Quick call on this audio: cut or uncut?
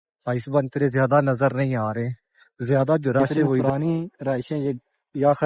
cut